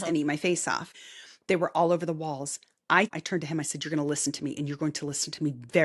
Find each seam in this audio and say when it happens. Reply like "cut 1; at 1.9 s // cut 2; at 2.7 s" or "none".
cut 1; at 0.9 s // cut 2; at 3.2 s